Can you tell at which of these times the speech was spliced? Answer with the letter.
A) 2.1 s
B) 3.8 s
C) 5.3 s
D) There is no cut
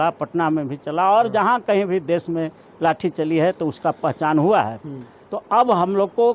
D